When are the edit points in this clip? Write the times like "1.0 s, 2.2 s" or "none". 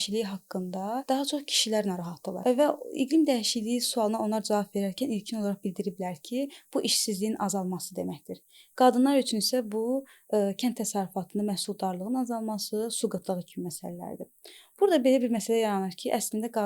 1.0 s, 2.3 s

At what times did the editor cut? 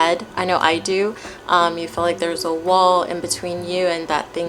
none

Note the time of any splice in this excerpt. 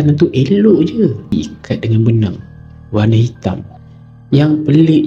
1.3 s

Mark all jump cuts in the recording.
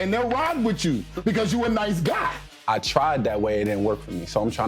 2.4 s

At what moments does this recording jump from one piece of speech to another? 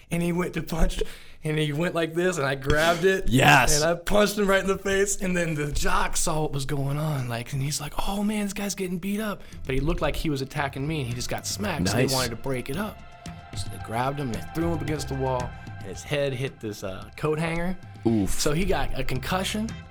none

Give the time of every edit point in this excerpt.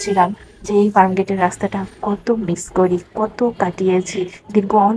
none

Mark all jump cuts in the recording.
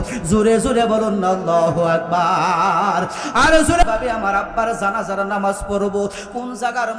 3.8 s

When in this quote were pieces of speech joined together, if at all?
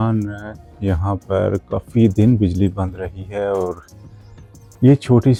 none

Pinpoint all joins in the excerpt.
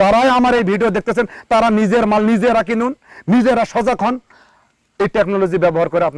none

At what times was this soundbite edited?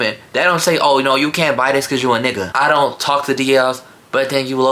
2.4 s

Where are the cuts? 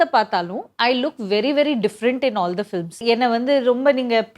2.9 s

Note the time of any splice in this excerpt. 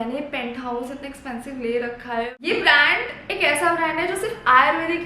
2.4 s

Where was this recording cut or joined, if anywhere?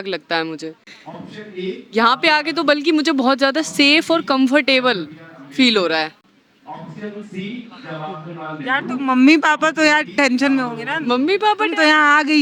none

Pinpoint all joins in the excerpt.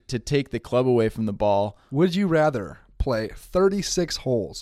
1.8 s, 2.7 s

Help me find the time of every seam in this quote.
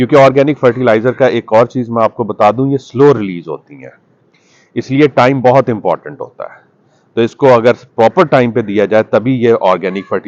none

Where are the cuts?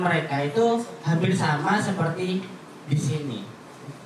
none

